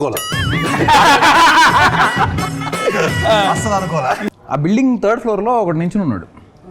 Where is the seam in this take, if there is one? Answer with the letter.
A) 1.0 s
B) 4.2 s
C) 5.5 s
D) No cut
B